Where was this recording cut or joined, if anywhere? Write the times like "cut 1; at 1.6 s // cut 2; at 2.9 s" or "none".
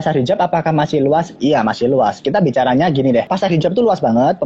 cut 1; at 3.3 s